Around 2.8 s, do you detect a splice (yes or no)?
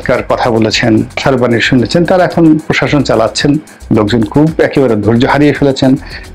no